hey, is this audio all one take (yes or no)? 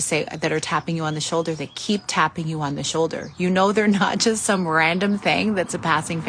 yes